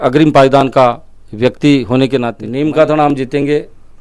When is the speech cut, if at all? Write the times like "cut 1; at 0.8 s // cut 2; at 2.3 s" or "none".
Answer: cut 1; at 2.4 s